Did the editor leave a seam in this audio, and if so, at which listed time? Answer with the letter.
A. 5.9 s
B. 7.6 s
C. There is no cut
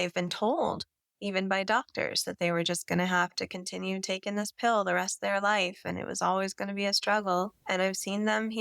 B